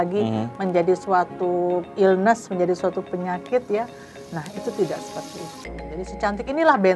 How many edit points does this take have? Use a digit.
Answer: 0